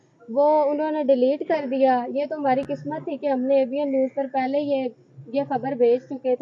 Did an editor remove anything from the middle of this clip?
no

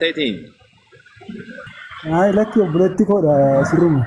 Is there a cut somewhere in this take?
yes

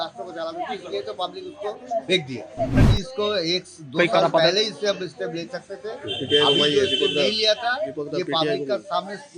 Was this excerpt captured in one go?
no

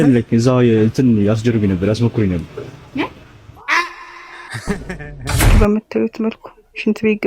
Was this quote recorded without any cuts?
no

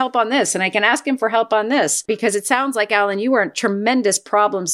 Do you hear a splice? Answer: yes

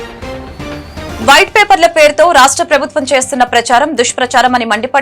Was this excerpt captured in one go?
yes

